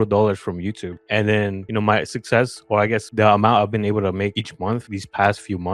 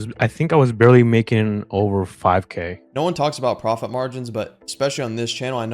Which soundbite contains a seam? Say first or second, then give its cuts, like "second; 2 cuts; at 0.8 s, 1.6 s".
second; 1 cut; at 2.8 s